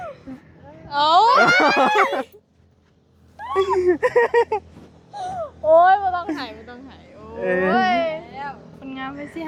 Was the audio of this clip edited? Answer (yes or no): no